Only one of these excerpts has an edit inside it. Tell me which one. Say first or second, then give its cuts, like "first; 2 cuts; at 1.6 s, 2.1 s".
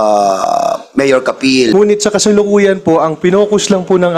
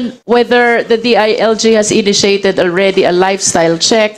first; 1 cut; at 1.7 s